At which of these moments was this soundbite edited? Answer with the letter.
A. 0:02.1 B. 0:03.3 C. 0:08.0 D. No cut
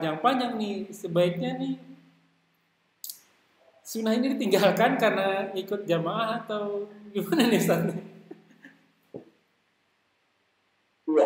D